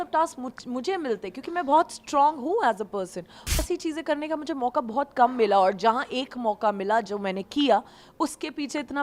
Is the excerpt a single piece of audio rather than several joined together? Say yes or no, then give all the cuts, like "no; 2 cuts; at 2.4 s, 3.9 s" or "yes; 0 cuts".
no; 1 cut; at 3.6 s